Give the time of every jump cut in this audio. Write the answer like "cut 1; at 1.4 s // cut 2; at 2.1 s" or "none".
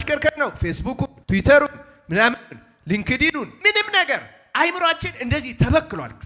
cut 1; at 1.2 s // cut 2; at 3.5 s